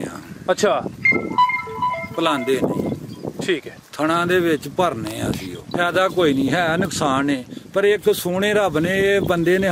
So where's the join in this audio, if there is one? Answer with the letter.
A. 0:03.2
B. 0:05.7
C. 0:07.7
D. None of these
B